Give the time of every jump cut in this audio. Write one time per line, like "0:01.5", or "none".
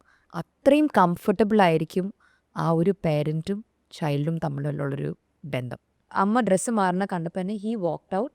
0:06.1